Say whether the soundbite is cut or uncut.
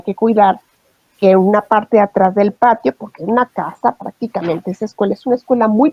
uncut